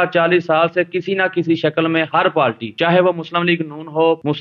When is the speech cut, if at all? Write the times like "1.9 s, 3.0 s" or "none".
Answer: none